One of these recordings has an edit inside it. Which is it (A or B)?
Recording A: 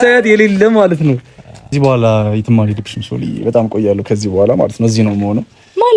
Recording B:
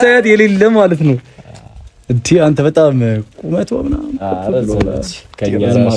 A